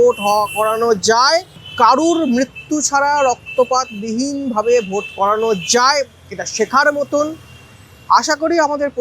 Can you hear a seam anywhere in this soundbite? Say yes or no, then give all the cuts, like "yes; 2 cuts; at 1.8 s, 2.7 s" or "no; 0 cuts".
no; 0 cuts